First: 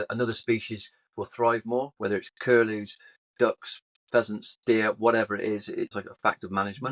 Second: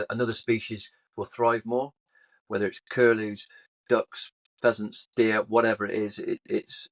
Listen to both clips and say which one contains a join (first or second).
first